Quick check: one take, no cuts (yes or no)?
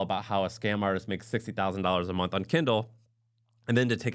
yes